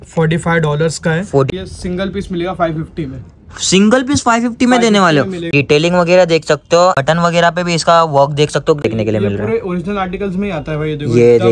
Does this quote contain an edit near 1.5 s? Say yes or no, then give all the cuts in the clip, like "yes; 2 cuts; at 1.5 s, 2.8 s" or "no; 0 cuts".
yes; 4 cuts; at 1.5 s, 5.5 s, 7.0 s, 8.8 s